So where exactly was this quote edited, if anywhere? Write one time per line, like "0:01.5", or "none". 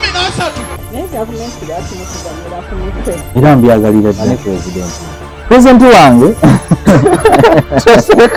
none